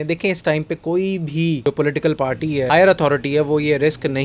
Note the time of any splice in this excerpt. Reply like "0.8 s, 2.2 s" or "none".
1.6 s, 2.7 s